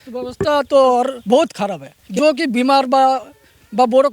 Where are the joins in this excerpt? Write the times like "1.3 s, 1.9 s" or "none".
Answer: 1.5 s

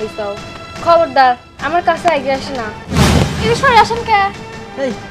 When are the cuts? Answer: 2.8 s

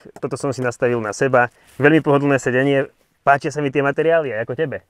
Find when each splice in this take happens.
none

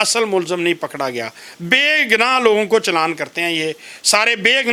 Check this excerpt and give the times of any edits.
none

